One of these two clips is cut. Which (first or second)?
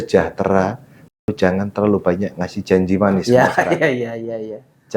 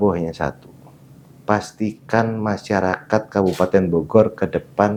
first